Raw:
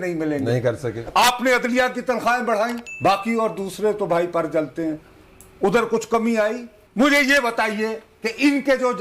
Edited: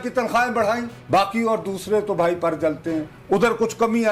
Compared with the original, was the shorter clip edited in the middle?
yes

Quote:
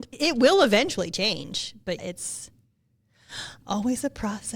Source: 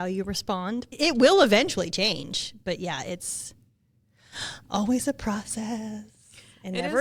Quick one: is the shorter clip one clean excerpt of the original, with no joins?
no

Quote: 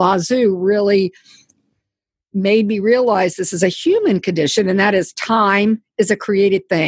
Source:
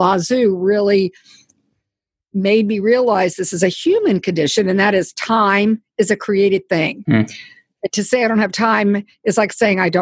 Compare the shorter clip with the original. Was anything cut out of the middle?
no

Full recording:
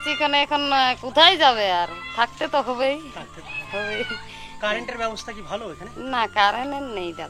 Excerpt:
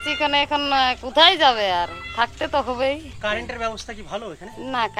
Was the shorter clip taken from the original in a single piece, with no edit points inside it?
no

